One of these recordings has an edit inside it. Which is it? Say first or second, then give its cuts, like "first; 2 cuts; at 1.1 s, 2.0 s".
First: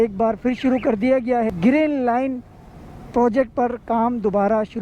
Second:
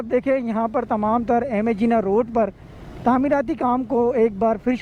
first; 1 cut; at 1.5 s